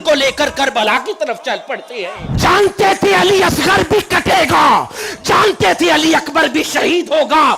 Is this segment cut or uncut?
cut